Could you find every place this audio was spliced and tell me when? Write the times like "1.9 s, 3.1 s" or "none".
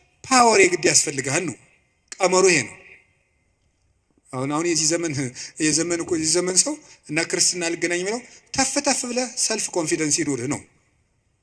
none

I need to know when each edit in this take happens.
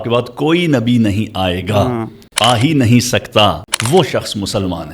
2.2 s, 3.7 s

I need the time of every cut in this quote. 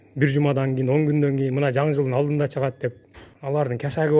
3.3 s

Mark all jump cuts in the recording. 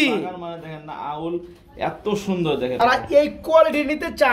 2.9 s

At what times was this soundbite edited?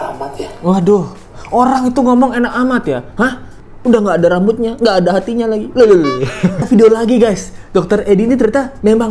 6.7 s

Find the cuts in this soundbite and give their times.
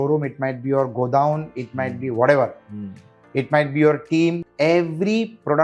4.5 s

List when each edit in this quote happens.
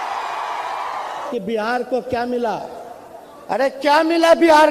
1.2 s

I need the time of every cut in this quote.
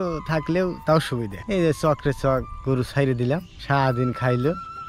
1.4 s, 3.5 s

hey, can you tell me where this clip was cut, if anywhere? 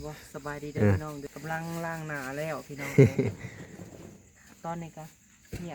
1.1 s

